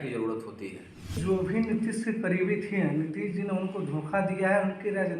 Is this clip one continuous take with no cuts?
no; 1 cut; at 1.1 s

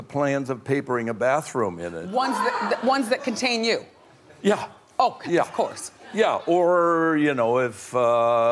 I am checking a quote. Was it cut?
yes; 1 cut; at 1.6 s

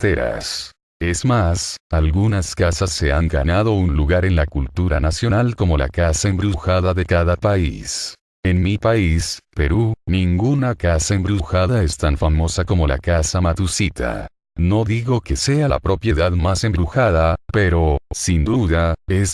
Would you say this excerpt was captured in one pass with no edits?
no; 2 cuts; at 13.0 s, 14.3 s

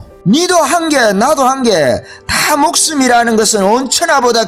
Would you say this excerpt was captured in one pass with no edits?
yes; 0 cuts

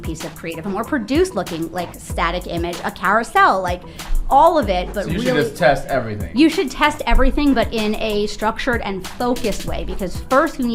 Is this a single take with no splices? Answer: yes; 0 cuts

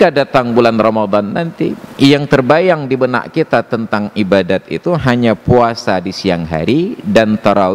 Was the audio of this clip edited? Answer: no; 0 cuts

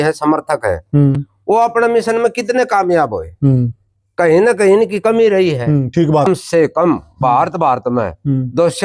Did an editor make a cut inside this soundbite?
yes; 1 cut; at 6.3 s

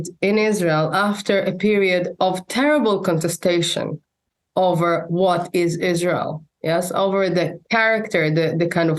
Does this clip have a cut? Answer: no; 0 cuts

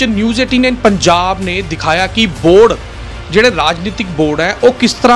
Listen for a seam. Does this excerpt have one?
no; 0 cuts

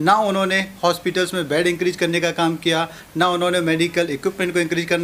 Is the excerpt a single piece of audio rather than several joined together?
yes; 0 cuts

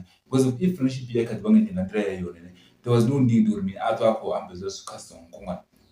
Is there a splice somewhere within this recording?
no; 0 cuts

